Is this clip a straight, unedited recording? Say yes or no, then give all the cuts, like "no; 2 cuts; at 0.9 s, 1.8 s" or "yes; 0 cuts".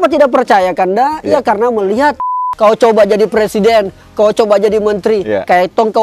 no; 1 cut; at 2.3 s